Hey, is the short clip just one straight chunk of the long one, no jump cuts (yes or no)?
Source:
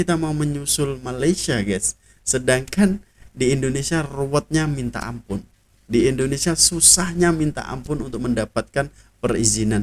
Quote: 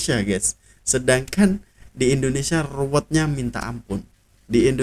yes